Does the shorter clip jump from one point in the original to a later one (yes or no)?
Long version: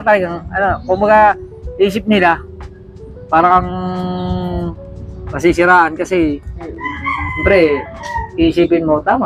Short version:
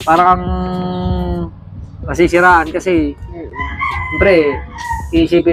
no